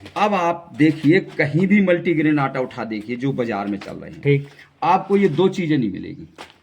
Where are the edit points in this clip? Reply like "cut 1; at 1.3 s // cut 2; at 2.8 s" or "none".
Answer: none